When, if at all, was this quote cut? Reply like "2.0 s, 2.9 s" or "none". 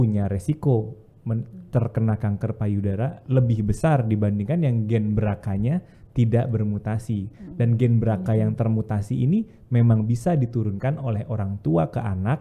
none